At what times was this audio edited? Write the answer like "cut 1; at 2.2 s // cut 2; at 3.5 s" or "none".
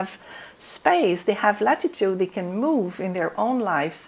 none